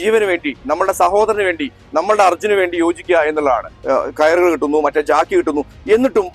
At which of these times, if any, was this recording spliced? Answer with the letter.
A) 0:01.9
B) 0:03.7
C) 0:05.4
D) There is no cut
B